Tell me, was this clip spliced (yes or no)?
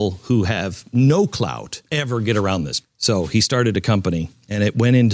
no